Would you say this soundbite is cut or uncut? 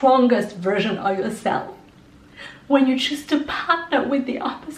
uncut